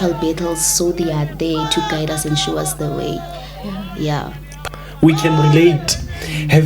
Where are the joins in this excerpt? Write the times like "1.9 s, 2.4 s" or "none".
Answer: 4.6 s